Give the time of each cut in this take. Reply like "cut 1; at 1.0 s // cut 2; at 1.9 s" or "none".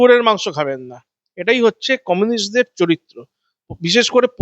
none